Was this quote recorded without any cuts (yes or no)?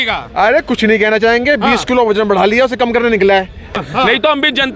no